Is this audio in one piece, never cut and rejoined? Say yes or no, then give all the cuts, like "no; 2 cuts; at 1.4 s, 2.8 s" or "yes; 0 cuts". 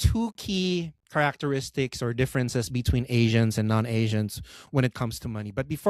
yes; 0 cuts